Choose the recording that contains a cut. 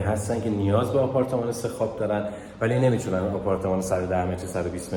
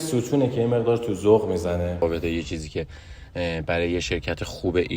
second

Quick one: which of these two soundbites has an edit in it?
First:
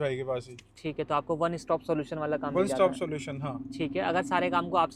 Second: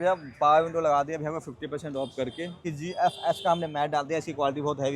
second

